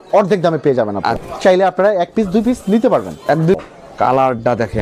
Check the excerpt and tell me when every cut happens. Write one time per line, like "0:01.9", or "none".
0:01.2
0:03.6